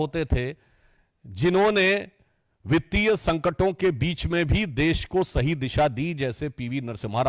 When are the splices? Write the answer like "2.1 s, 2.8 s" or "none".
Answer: none